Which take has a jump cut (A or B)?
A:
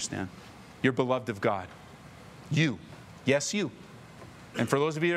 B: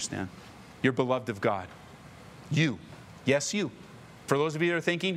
B